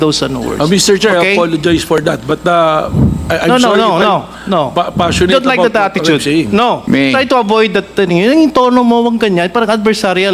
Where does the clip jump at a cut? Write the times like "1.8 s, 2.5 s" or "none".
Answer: 6.8 s